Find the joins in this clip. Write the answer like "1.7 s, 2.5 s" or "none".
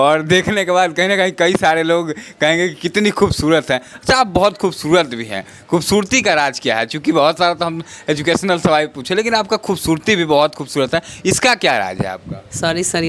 none